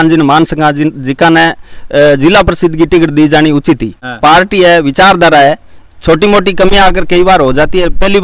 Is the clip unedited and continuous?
no; 1 cut; at 4.0 s

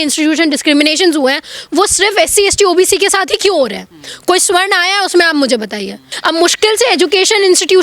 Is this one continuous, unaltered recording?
no; 1 cut; at 6.1 s

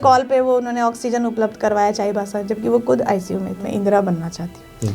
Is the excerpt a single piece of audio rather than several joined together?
no; 1 cut; at 3.6 s

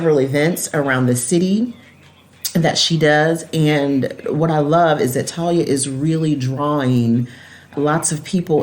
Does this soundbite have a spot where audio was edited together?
yes; 1 cut; at 7.7 s

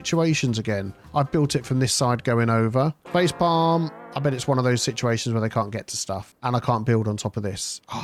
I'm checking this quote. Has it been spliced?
no; 0 cuts

